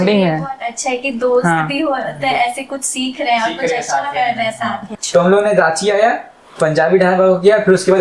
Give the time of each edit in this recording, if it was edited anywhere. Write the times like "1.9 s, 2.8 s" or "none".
4.8 s